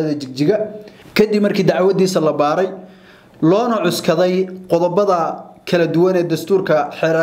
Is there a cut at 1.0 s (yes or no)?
yes